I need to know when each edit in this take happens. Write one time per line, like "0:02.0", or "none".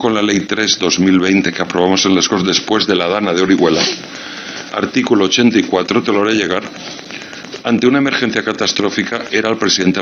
none